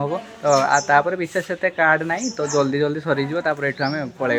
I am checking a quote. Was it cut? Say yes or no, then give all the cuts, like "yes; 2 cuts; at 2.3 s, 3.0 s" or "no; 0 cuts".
no; 0 cuts